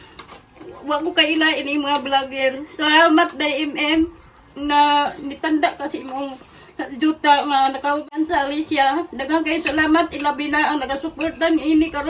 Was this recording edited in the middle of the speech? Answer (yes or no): yes